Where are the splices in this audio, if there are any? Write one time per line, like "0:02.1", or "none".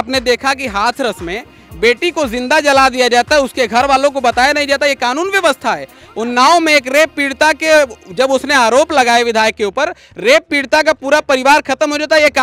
none